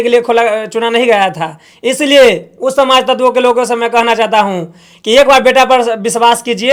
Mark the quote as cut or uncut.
uncut